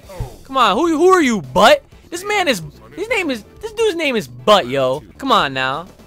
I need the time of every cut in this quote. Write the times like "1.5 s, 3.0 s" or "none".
5.1 s